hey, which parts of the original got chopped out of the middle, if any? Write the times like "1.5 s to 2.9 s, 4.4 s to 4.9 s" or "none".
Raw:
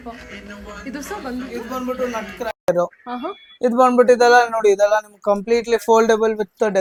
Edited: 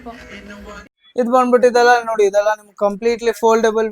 0.9 s to 3.4 s